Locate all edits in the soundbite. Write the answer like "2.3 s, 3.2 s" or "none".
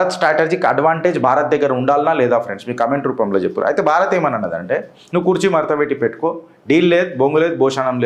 none